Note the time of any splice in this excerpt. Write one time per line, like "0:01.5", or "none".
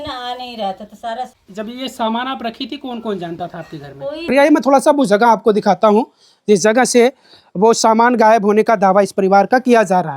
0:01.4
0:04.2